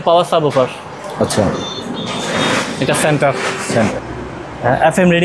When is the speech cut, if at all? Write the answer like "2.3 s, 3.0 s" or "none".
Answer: 3.8 s